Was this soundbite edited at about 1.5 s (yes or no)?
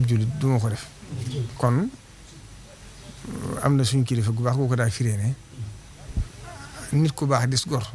yes